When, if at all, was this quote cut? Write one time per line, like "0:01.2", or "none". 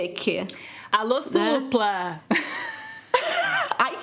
none